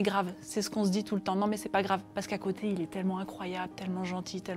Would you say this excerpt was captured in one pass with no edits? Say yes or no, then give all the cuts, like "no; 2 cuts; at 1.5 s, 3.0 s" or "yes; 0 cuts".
yes; 0 cuts